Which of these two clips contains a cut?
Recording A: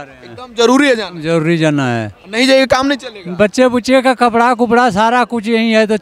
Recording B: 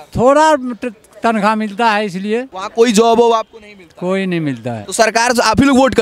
B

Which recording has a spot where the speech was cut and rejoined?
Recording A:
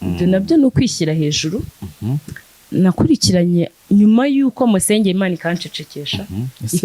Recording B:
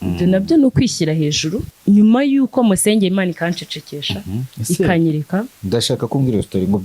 B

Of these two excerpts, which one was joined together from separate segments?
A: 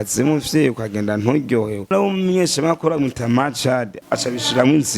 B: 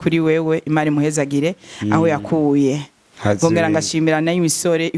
A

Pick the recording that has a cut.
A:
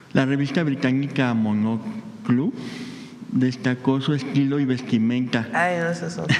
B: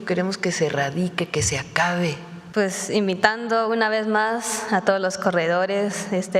B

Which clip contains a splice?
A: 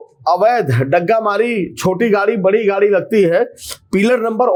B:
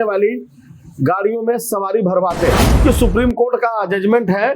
B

